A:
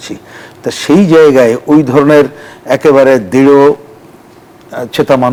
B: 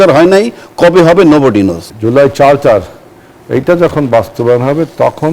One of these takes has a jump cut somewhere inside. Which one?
B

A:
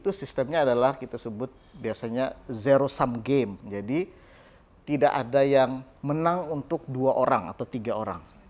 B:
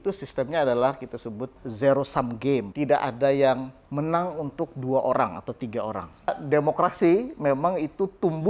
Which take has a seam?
B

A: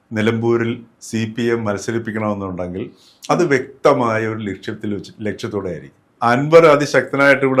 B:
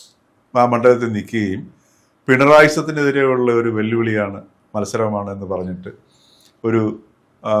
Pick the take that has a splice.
A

